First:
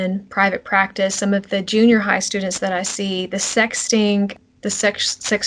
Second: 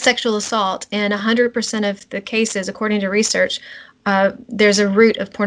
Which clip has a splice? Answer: first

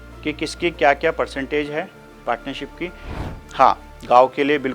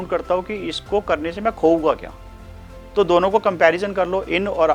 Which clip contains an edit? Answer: first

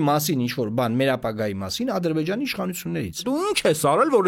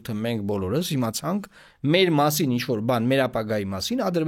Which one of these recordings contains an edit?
first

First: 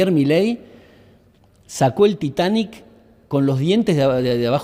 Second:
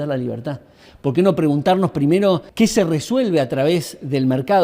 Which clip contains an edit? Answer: second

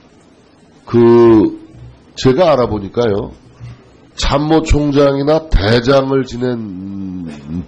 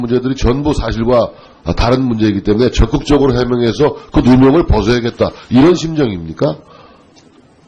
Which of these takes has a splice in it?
second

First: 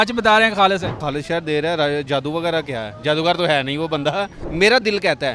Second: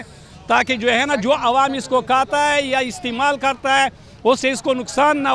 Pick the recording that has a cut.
first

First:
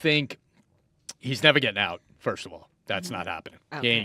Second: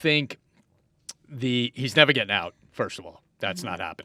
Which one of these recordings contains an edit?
first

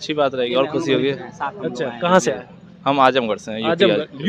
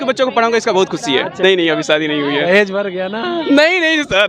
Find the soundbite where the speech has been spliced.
second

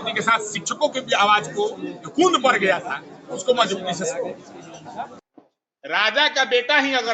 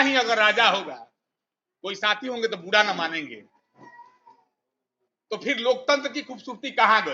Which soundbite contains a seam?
first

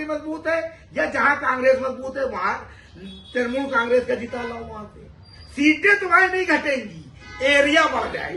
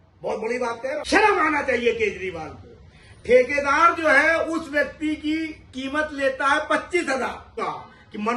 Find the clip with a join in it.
second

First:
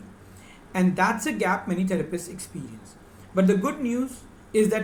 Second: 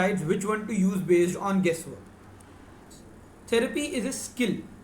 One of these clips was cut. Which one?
second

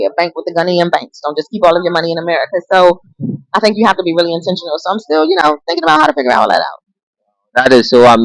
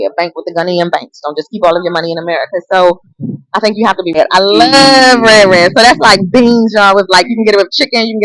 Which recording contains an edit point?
second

